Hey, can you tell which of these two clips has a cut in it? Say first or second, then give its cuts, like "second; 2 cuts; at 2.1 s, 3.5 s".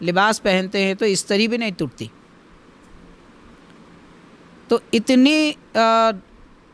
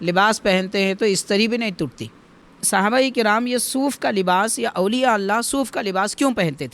second; 1 cut; at 2.5 s